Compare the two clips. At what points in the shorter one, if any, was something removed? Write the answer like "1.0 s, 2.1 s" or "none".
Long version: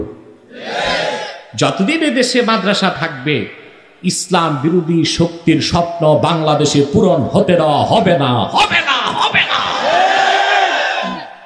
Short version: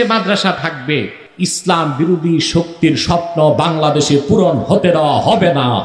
1.2 s